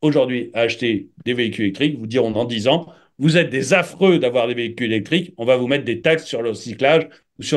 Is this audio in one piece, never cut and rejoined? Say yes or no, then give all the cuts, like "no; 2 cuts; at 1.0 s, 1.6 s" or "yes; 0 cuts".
yes; 0 cuts